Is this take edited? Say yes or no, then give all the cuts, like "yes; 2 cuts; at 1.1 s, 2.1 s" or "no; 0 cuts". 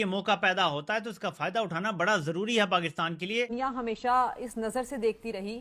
yes; 1 cut; at 3.5 s